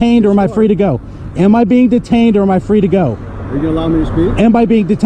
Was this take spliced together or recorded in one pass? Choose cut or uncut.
uncut